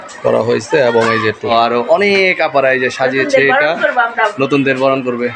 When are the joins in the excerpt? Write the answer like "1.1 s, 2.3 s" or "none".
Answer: 1.5 s